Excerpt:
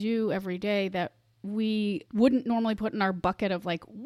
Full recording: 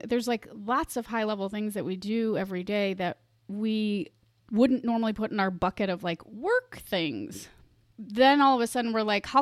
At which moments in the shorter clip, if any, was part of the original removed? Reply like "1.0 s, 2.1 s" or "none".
2.0 s